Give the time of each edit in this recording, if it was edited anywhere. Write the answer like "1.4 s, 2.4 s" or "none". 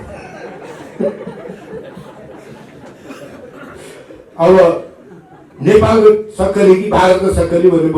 none